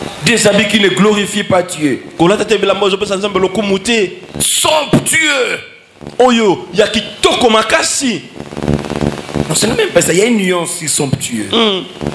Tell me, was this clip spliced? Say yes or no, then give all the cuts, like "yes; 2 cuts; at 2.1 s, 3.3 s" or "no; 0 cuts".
no; 0 cuts